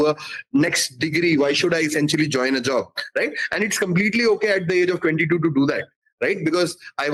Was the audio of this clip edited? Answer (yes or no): no